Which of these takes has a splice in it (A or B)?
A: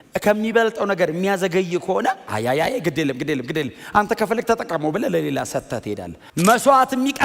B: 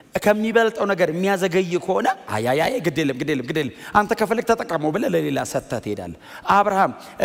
A